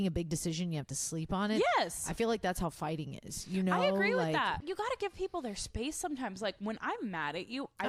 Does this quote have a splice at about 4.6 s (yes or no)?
yes